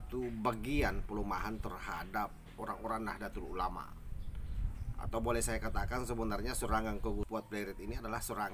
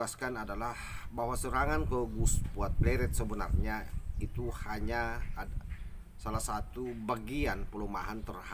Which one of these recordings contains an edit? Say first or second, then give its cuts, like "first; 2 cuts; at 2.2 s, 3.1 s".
first; 1 cut; at 7.3 s